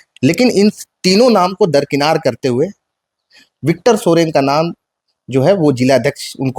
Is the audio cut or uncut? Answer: uncut